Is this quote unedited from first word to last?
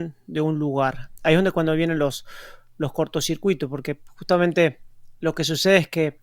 yes; 0 cuts

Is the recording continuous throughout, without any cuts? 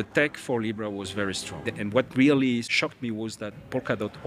no; 2 cuts; at 1.7 s, 2.7 s

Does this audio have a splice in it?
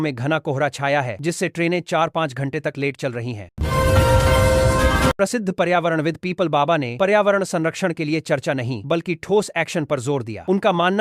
yes; 2 cuts; at 3.5 s, 5.2 s

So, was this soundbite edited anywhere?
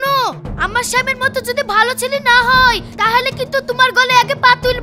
no; 0 cuts

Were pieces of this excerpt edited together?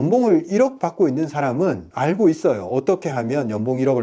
no; 0 cuts

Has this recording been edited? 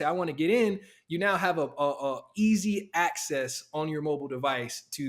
no; 0 cuts

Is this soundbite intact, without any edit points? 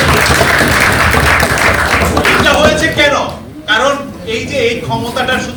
yes; 0 cuts

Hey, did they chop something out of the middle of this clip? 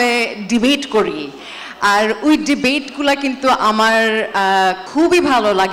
yes; 1 cut; at 4.8 s

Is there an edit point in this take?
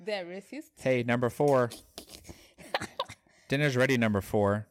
no; 0 cuts

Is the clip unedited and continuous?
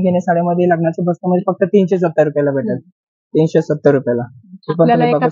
yes; 0 cuts

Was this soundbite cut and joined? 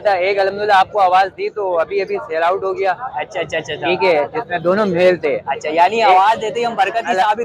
no; 0 cuts

